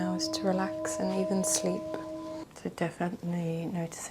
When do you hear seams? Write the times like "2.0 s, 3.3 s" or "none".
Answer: 2.4 s